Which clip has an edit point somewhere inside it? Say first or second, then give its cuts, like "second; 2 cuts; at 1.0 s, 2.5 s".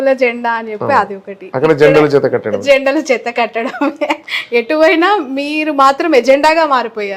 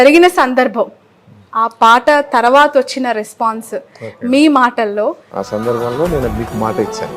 second; 1 cut; at 5.2 s